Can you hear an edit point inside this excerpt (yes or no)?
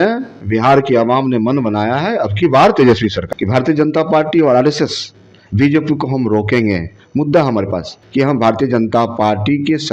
yes